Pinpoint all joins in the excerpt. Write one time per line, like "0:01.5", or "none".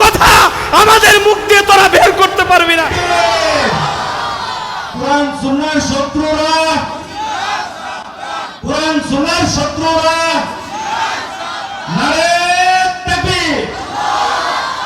0:02.9

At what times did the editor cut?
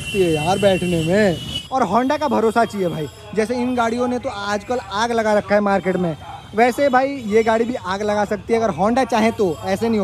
0:01.6

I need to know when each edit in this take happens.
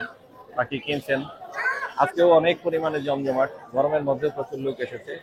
none

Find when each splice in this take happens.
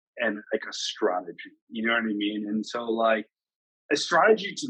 none

